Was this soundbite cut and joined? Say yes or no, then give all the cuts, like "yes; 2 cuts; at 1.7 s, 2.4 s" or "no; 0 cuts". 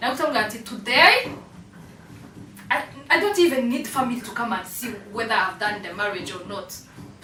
no; 0 cuts